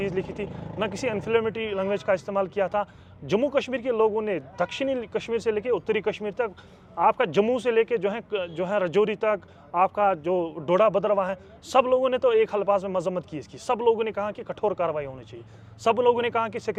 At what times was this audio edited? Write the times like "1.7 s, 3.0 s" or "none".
none